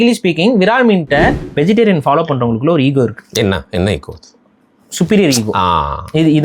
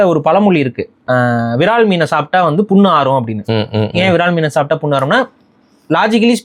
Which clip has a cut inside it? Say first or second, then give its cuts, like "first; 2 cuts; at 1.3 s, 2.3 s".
first; 1 cut; at 1.4 s